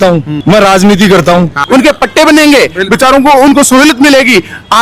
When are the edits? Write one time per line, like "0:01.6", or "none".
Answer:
0:01.6